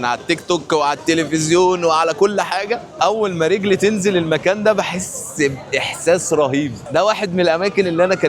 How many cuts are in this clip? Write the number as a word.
one